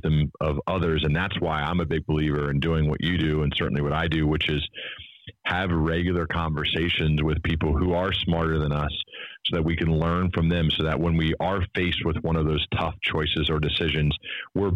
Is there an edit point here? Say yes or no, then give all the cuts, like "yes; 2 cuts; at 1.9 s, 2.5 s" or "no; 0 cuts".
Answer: no; 0 cuts